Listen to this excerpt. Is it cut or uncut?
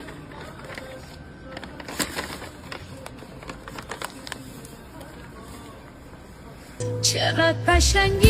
cut